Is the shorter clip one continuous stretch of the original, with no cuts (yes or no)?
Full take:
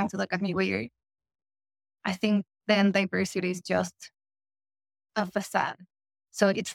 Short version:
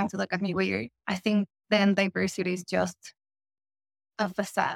no